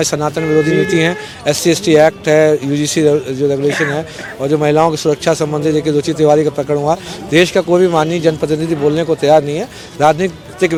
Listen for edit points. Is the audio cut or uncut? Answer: uncut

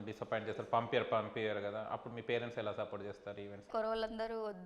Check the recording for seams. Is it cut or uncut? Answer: cut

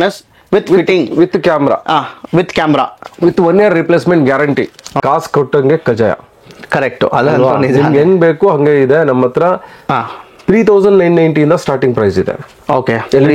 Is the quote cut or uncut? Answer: cut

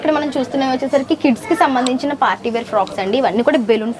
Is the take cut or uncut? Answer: uncut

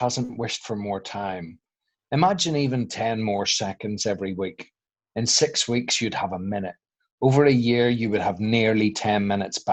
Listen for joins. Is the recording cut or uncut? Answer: uncut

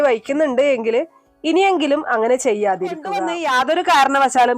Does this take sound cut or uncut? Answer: cut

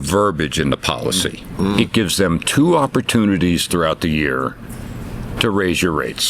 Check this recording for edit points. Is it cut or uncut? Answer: cut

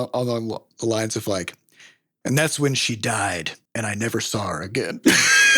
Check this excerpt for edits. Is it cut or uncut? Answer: cut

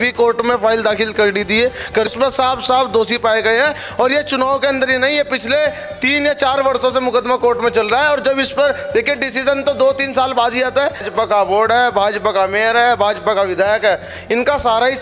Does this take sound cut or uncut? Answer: cut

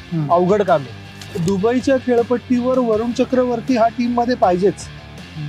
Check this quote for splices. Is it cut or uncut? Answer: cut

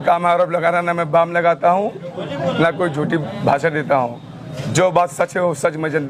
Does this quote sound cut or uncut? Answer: uncut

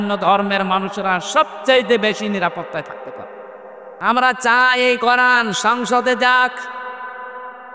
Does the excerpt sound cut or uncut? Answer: cut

